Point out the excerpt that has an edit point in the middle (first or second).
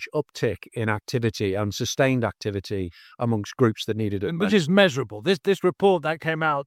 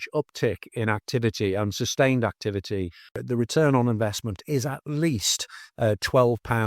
second